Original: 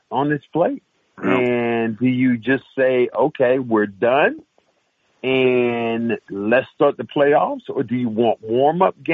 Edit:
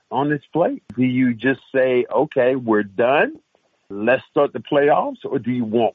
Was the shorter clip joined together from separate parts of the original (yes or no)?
yes